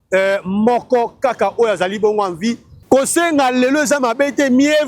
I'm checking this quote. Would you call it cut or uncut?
cut